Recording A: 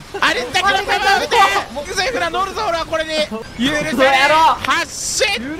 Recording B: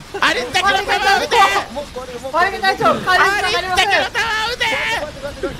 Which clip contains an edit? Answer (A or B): A